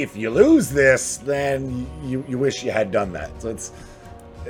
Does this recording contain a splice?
no; 0 cuts

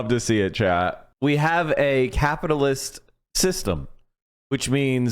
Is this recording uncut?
no; 1 cut; at 1.0 s

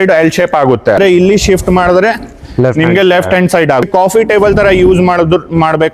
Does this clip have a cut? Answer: yes; 2 cuts; at 1.0 s, 3.8 s

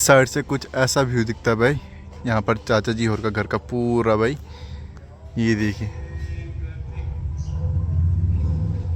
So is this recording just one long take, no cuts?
yes; 0 cuts

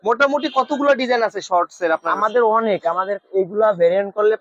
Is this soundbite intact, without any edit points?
yes; 0 cuts

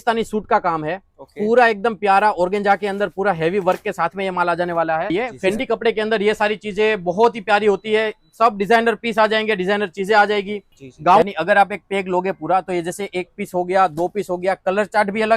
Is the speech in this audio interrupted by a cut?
yes; 2 cuts; at 5.1 s, 11.2 s

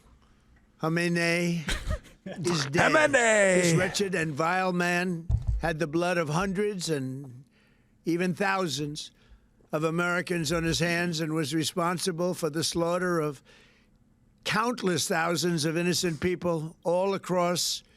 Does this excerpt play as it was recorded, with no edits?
yes; 0 cuts

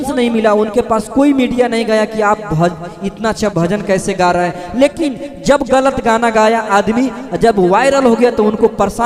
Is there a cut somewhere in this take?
no; 0 cuts

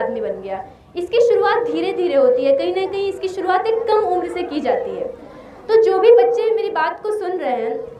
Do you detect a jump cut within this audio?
no; 0 cuts

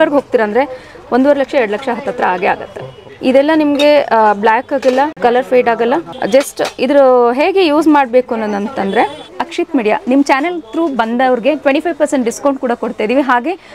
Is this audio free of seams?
no; 4 cuts; at 3.0 s, 5.1 s, 6.1 s, 9.3 s

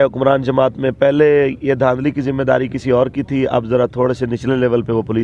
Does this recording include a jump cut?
no; 0 cuts

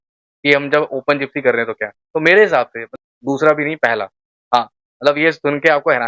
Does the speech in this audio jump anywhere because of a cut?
yes; 1 cut; at 2.8 s

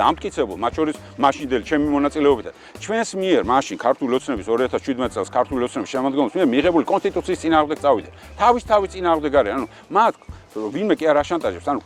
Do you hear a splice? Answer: no; 0 cuts

